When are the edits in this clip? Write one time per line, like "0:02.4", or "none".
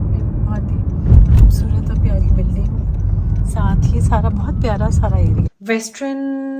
0:05.5